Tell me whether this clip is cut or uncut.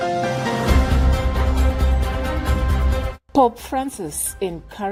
uncut